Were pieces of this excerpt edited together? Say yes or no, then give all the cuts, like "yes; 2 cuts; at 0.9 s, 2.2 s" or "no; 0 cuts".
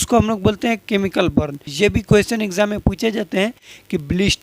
yes; 1 cut; at 1.6 s